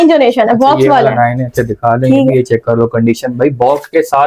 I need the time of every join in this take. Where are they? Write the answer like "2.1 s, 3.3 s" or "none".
none